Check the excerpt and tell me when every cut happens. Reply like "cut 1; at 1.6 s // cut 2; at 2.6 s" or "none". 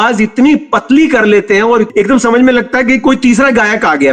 cut 1; at 1.9 s